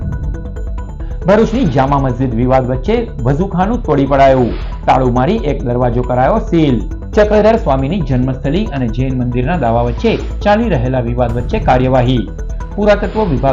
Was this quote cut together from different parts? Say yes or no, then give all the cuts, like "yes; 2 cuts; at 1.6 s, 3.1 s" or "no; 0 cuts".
no; 0 cuts